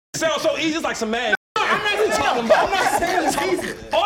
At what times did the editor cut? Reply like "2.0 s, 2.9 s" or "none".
none